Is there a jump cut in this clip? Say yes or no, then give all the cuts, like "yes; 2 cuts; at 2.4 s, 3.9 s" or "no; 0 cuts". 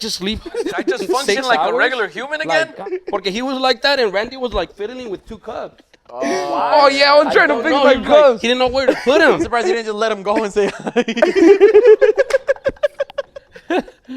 yes; 1 cut; at 2.9 s